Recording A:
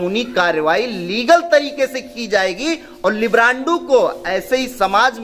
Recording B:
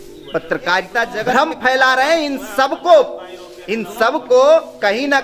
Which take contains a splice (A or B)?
B